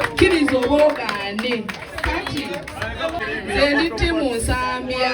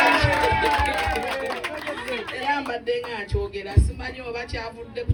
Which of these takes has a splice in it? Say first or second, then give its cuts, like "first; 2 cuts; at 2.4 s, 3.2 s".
first; 1 cut; at 3.2 s